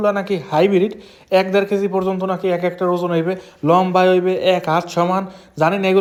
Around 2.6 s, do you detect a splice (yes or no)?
no